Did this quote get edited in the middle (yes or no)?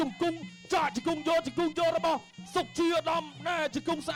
no